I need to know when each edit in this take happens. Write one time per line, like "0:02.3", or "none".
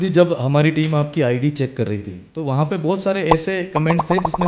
none